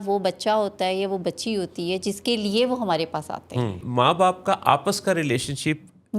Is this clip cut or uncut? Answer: cut